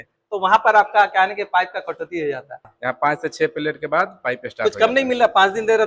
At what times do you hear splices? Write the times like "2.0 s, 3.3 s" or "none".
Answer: 2.7 s